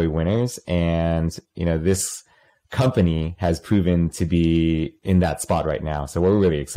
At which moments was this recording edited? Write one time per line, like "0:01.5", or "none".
0:05.0